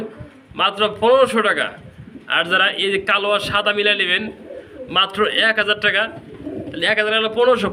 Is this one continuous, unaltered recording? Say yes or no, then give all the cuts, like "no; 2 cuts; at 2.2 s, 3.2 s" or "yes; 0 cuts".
yes; 0 cuts